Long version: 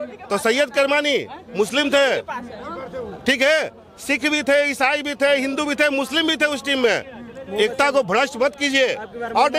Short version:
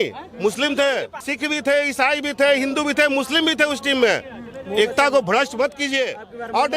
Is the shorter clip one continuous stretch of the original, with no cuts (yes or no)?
no